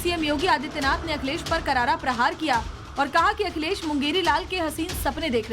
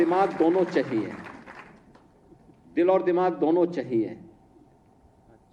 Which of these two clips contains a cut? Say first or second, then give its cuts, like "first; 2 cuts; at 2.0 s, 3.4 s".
first; 1 cut; at 1.2 s